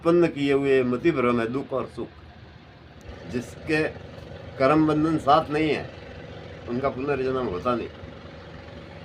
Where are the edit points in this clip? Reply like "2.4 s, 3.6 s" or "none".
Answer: 3.1 s